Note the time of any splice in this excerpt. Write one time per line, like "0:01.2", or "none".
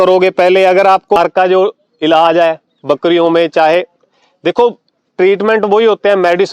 0:01.2